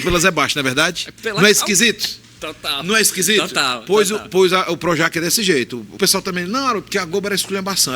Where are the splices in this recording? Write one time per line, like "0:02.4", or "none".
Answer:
0:05.9